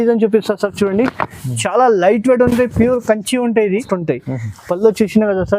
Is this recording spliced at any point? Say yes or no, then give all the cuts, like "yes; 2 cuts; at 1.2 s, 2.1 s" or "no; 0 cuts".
yes; 1 cut; at 3.8 s